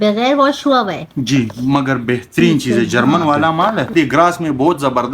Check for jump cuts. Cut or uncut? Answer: cut